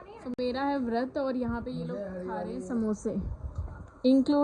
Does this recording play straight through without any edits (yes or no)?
yes